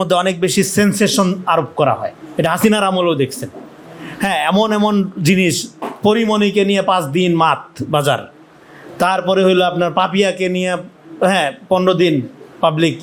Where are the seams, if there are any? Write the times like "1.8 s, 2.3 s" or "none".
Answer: none